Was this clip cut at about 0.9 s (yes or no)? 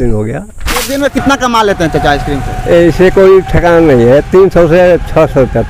yes